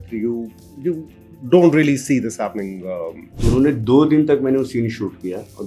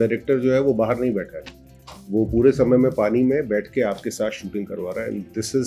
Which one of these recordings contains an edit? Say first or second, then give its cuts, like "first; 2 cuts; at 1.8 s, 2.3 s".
first; 1 cut; at 3.2 s